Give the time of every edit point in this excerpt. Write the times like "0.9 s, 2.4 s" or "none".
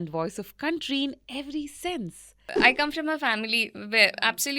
2.5 s